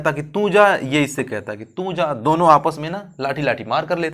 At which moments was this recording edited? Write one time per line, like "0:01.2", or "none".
none